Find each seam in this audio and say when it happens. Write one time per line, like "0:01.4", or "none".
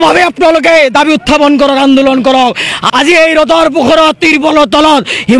0:02.8